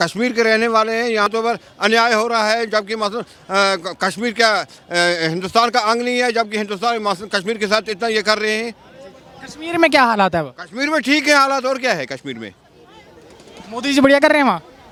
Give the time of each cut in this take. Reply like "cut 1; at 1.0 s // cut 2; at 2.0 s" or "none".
none